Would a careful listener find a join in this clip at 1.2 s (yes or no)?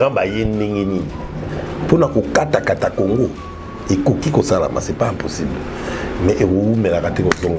no